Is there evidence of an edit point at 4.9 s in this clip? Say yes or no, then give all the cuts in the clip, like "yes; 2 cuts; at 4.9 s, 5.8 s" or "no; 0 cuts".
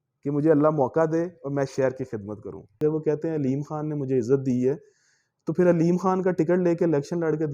no; 1 cut; at 2.8 s